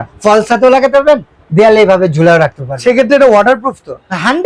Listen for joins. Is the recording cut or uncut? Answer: uncut